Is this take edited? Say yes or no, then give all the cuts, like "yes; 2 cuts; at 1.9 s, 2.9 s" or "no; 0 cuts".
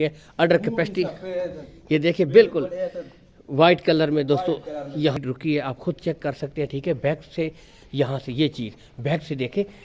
yes; 1 cut; at 5.2 s